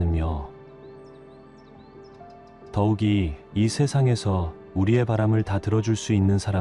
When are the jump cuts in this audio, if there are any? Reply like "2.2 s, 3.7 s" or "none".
0.9 s, 2.7 s